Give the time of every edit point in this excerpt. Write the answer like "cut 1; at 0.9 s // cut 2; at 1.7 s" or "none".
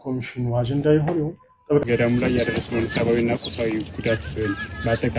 cut 1; at 1.8 s